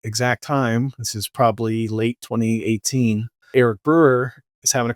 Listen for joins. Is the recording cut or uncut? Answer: cut